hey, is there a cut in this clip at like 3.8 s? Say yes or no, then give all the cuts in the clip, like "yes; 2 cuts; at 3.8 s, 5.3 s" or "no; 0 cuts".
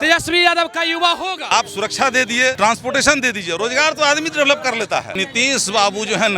no; 3 cuts; at 1.5 s, 2.6 s, 5.1 s